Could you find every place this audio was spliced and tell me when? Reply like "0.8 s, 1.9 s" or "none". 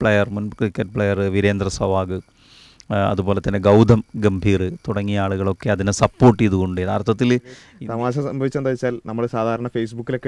7.7 s